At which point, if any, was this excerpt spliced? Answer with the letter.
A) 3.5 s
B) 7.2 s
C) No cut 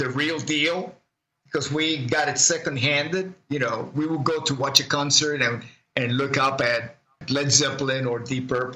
B